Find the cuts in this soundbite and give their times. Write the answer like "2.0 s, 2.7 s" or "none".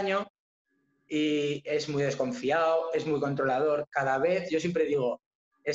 none